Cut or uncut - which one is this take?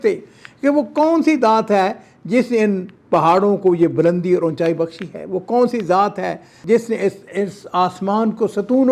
uncut